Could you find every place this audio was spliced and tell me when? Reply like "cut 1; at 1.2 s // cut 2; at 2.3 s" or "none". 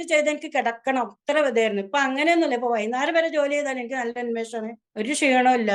cut 1; at 4.8 s